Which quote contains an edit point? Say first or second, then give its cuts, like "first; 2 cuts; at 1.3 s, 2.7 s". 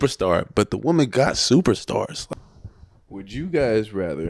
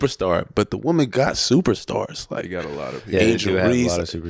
first; 1 cut; at 2.2 s